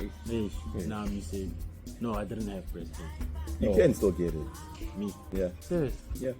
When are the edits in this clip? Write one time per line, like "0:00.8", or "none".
0:01.8
0:04.8